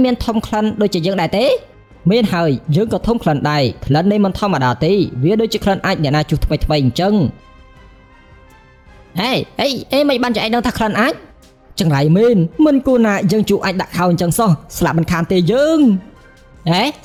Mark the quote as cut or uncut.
uncut